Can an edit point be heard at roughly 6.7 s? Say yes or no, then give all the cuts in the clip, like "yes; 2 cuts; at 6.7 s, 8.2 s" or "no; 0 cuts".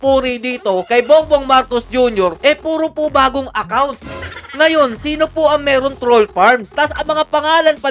yes; 1 cut; at 6.7 s